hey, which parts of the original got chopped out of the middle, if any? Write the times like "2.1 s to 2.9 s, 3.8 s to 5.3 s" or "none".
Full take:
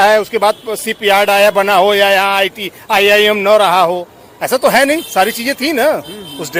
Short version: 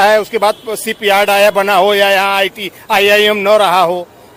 none